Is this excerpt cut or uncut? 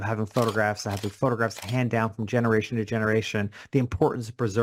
uncut